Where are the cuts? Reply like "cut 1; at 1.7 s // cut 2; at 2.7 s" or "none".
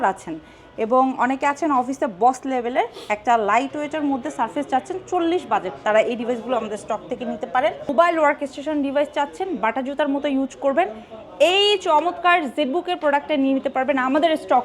cut 1; at 7.9 s